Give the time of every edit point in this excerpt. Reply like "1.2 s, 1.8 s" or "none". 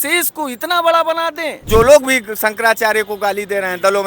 1.7 s